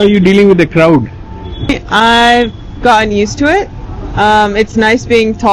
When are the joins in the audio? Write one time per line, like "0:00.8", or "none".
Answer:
0:01.8